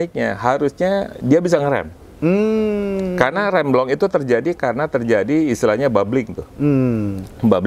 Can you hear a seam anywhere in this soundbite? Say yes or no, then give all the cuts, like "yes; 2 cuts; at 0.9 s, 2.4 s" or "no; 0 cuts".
no; 0 cuts